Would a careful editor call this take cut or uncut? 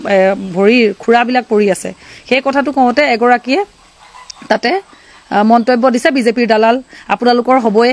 uncut